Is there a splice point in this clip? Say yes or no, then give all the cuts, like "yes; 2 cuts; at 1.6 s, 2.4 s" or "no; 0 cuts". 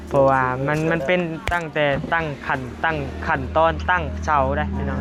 no; 0 cuts